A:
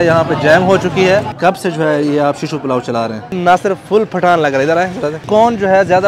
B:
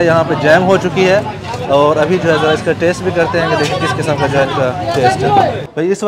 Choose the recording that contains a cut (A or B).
A